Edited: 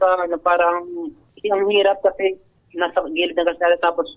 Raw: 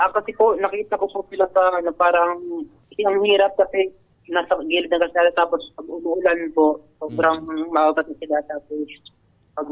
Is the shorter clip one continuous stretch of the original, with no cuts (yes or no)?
yes